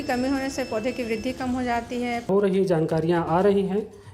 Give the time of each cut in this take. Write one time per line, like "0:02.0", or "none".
0:02.3